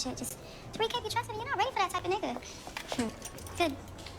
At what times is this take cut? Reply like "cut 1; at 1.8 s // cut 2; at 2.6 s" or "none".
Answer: cut 1; at 3.0 s